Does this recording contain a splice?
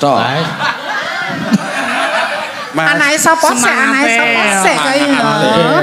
no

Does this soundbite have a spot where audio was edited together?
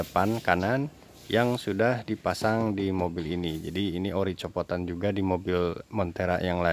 no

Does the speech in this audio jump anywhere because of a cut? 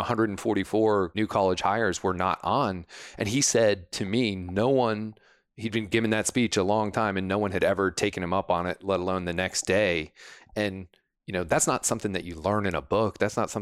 yes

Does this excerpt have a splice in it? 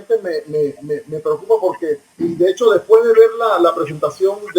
yes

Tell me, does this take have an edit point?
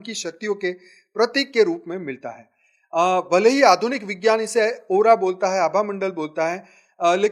no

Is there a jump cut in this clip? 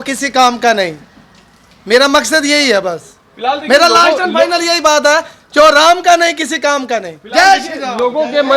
no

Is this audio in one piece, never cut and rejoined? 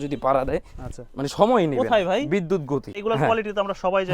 no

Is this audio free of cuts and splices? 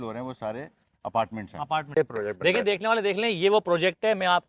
no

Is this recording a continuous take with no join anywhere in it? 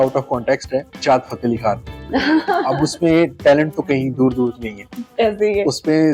yes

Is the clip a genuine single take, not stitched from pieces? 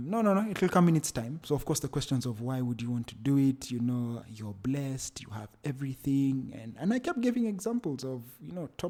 yes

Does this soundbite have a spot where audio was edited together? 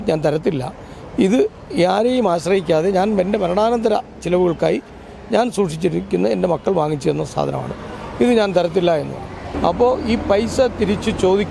yes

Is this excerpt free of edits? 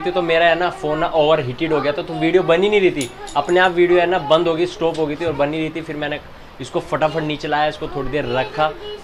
yes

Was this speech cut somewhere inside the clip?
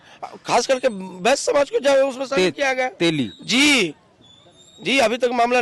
no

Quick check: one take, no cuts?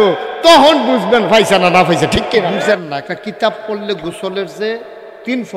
no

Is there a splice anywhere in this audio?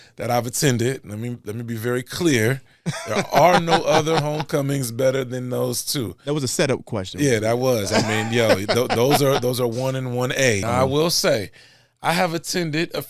yes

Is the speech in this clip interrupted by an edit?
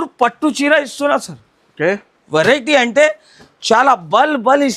no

